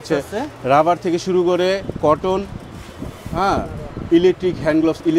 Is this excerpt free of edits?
yes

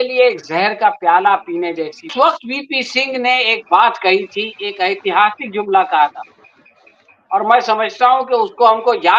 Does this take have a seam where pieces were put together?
yes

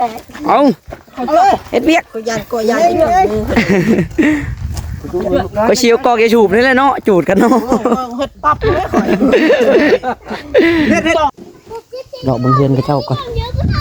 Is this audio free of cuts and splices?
no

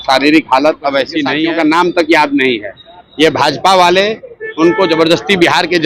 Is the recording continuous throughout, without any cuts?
no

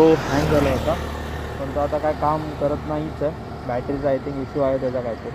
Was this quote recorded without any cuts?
yes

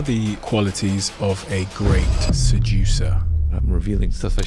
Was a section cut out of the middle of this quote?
no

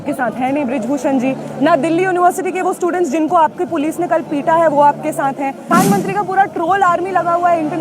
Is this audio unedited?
no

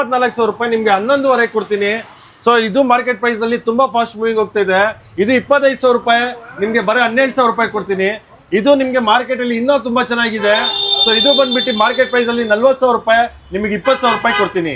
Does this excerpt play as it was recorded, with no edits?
yes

